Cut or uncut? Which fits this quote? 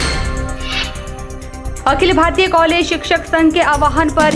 cut